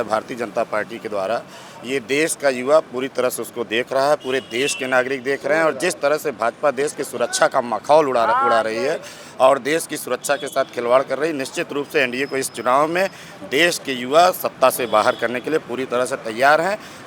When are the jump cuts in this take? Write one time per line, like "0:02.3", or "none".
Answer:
none